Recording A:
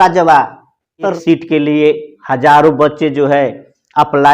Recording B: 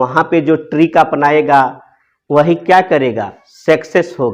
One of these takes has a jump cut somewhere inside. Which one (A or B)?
A